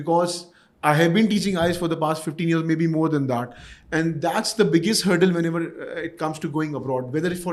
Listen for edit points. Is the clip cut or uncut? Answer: uncut